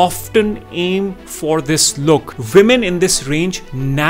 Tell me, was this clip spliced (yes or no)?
yes